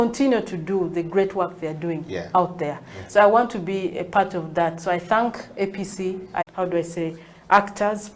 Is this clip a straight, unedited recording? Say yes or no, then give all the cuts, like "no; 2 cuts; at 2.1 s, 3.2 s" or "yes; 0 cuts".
no; 1 cut; at 6.5 s